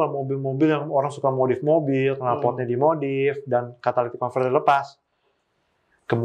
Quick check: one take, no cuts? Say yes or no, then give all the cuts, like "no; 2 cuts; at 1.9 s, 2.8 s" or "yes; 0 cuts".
yes; 0 cuts